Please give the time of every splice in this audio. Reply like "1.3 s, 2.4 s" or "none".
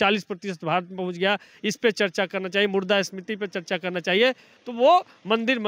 none